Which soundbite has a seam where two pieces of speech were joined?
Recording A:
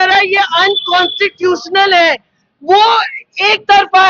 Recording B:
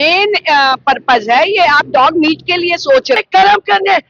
B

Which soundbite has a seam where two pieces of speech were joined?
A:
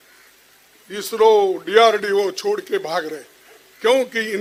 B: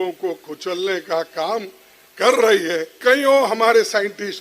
B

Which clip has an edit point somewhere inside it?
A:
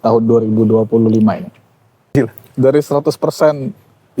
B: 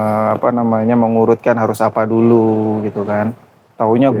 A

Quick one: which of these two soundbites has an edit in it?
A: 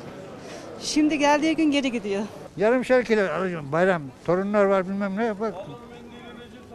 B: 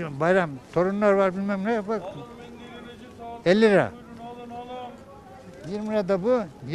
A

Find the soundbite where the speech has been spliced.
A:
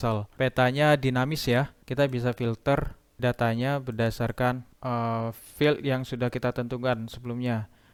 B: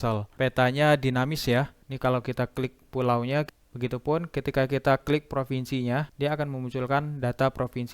B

